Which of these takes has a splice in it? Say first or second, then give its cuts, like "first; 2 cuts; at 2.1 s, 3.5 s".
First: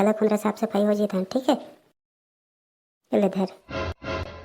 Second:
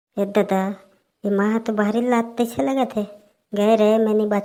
first; 1 cut; at 3.6 s